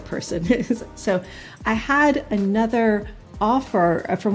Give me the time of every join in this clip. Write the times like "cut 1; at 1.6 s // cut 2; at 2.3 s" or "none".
none